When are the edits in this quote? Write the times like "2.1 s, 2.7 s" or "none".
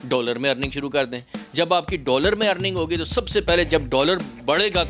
none